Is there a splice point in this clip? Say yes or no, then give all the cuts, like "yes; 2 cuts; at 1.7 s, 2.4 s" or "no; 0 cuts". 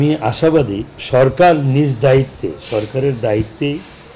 yes; 1 cut; at 1.0 s